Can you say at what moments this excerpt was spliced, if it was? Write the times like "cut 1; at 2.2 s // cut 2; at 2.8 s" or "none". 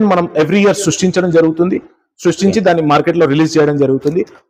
none